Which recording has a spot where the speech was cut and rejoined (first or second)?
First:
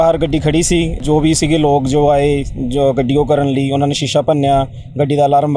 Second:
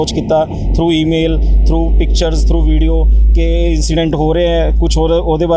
first